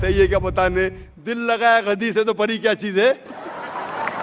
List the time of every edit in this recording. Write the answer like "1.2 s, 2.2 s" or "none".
none